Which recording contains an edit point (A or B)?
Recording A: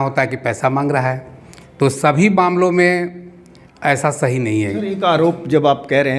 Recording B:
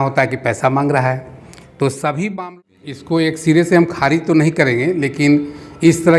B